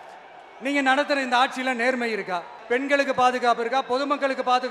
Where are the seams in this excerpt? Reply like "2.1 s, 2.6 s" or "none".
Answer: 2.6 s